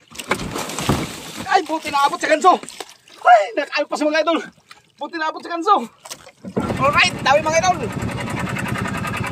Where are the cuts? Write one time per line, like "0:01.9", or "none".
0:06.7